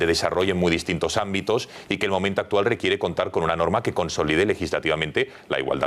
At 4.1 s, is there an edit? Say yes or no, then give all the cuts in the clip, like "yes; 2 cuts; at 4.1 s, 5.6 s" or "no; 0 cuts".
no; 1 cut; at 1.1 s